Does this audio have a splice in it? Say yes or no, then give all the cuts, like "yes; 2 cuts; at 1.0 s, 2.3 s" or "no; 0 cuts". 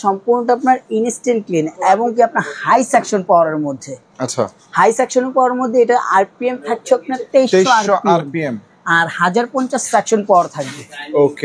no; 0 cuts